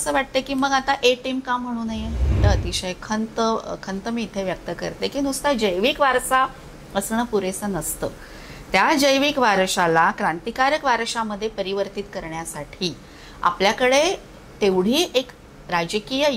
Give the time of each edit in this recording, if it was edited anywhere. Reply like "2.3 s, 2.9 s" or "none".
2.3 s